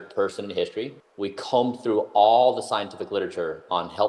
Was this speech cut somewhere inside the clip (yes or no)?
yes